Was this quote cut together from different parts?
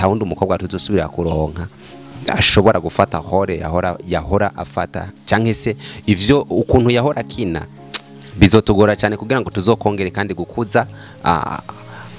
no; 0 cuts

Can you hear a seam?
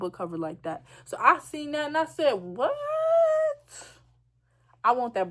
no; 0 cuts

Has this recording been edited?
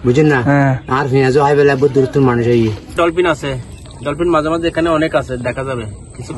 yes; 1 cut; at 2.9 s

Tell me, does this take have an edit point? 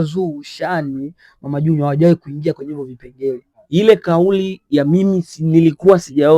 yes; 1 cut; at 3.5 s

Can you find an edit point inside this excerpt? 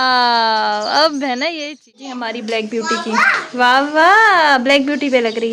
yes; 1 cut; at 2.1 s

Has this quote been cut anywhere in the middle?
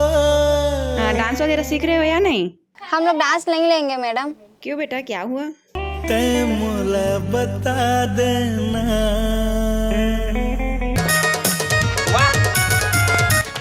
yes; 1 cut; at 10.9 s

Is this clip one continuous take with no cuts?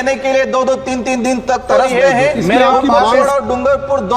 no; 1 cut; at 3.1 s

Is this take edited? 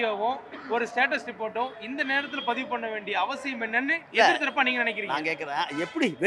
no; 0 cuts

